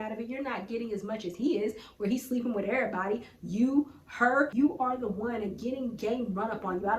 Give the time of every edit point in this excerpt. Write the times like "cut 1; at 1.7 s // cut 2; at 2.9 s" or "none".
cut 1; at 4.5 s